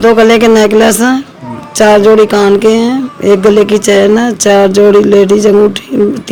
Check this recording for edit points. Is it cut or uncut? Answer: uncut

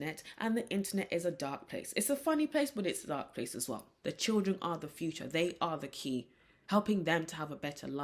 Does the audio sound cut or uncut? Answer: cut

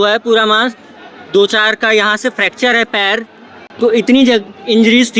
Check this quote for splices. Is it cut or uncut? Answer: uncut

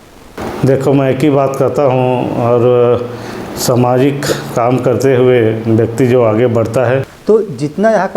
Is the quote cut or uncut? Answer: cut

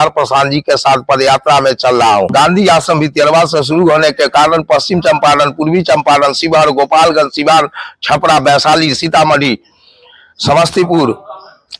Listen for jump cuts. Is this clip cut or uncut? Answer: cut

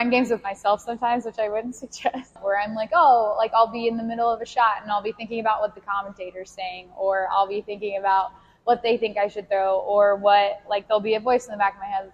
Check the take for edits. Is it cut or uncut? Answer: cut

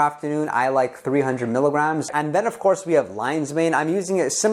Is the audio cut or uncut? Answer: cut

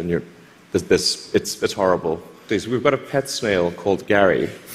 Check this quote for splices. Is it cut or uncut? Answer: cut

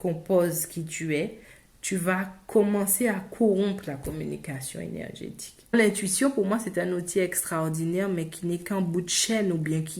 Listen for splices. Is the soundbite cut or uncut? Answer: cut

